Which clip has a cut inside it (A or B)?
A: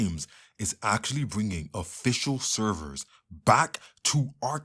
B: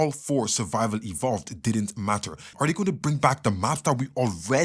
B